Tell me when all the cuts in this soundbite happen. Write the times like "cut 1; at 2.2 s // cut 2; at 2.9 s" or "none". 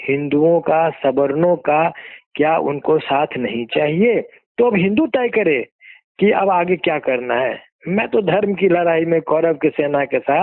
cut 1; at 4.4 s